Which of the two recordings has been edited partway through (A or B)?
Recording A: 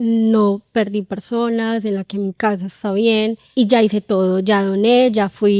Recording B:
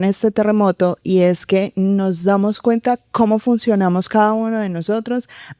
A